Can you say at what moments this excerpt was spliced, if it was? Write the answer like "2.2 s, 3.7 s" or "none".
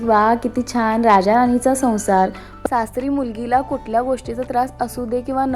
2.5 s